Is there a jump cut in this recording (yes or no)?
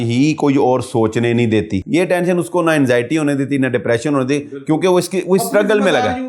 yes